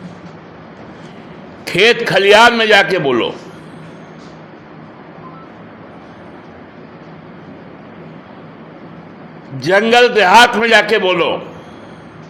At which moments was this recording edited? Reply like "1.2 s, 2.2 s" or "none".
none